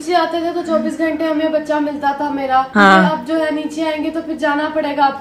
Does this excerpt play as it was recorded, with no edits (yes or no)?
yes